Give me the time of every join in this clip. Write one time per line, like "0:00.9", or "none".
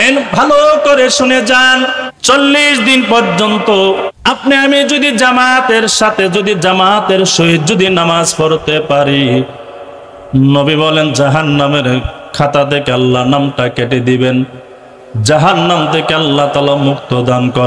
0:02.1
0:04.1